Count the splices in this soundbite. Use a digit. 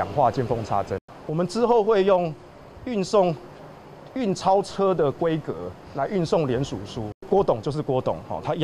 2